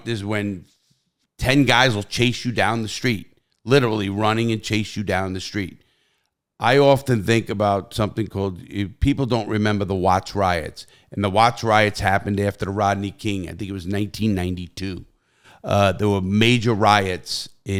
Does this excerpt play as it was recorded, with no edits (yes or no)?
yes